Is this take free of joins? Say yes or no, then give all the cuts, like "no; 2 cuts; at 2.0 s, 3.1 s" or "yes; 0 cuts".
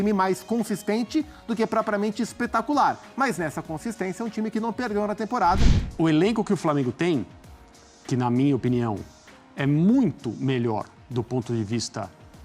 no; 1 cut; at 5.8 s